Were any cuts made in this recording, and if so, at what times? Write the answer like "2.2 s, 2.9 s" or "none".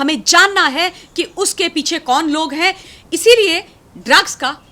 2.9 s